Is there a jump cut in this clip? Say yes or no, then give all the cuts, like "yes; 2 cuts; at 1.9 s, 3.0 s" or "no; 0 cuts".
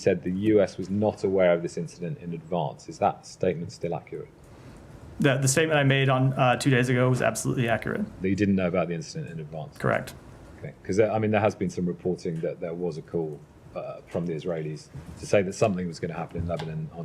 no; 0 cuts